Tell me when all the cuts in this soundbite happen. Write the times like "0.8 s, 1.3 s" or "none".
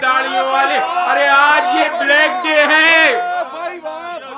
none